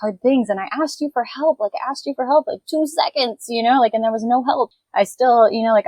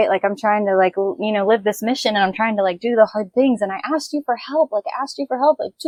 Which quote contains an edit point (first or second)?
first